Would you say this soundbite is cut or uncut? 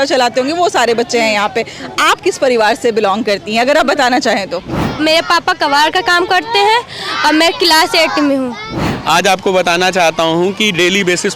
cut